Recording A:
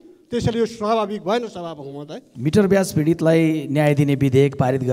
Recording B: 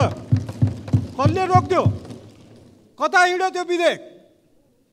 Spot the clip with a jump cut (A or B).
A